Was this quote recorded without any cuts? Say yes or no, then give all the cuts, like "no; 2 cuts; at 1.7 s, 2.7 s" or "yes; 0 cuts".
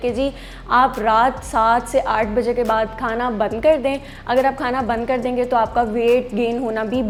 yes; 0 cuts